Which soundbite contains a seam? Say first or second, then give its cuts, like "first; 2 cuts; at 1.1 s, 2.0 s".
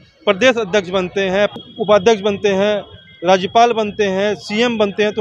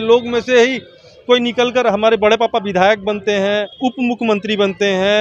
second; 1 cut; at 3.7 s